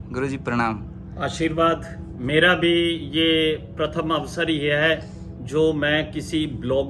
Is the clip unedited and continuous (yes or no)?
yes